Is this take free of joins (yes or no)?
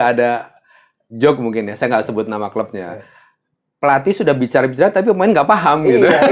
yes